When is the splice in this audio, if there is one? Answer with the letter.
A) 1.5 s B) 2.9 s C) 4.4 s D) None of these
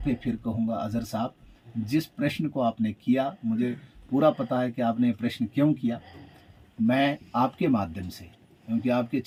D